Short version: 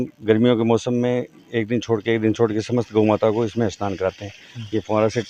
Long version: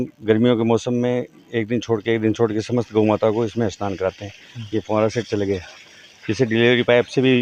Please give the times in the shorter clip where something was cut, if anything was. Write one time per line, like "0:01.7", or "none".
none